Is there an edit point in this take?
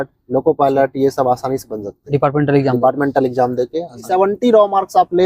yes; 1 cut; at 4.1 s

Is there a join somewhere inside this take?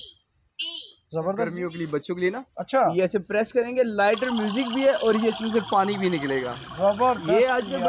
yes; 1 cut; at 1.5 s

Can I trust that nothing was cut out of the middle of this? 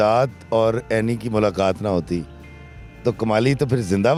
yes; 0 cuts

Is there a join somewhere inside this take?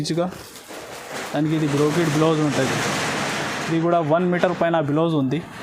no; 0 cuts

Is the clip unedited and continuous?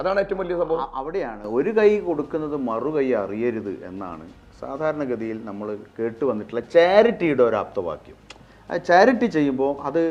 yes; 0 cuts

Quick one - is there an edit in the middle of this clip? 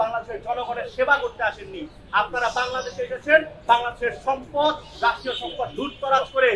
no; 0 cuts

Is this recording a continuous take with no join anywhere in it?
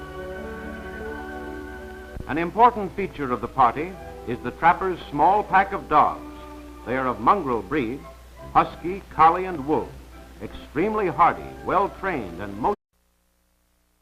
yes; 0 cuts

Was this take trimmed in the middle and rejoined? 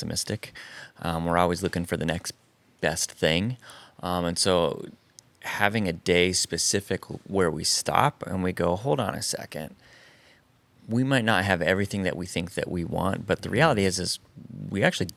no; 0 cuts

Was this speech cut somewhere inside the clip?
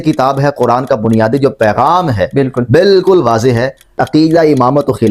yes; 1 cut; at 4.0 s

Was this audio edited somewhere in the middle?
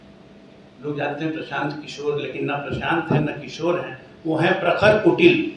no; 0 cuts

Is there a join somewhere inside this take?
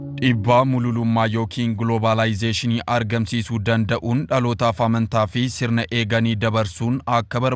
no; 0 cuts

